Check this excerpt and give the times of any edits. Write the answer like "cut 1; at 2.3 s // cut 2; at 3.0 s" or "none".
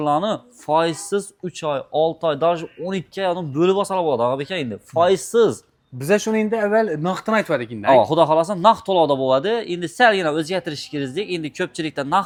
none